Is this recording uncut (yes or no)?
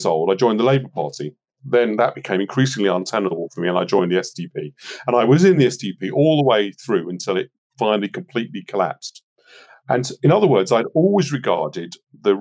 no